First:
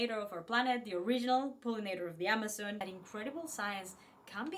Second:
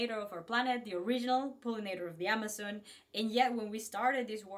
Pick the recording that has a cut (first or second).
first